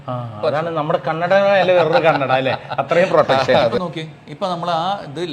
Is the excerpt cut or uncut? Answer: cut